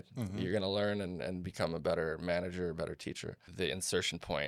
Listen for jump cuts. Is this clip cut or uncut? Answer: cut